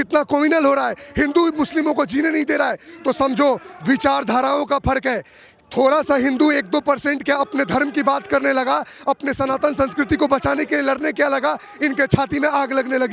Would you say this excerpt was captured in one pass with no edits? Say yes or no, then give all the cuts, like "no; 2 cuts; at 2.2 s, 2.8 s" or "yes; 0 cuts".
yes; 0 cuts